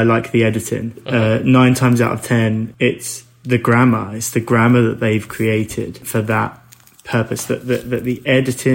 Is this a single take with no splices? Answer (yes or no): no